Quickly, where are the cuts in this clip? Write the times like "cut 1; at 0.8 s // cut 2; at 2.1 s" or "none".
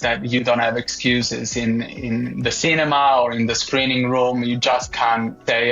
none